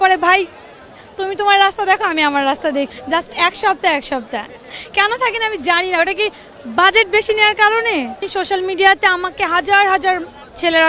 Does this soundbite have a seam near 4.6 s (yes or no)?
yes